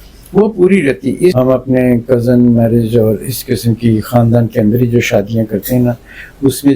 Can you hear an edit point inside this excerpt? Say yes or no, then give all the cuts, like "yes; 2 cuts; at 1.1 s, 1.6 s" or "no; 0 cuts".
yes; 1 cut; at 1.3 s